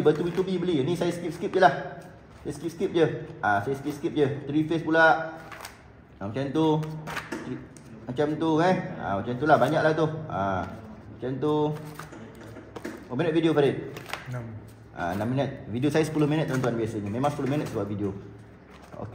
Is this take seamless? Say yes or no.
yes